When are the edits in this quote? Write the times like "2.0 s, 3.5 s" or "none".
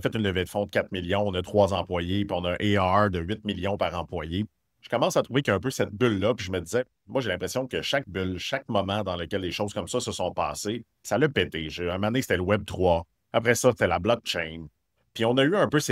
none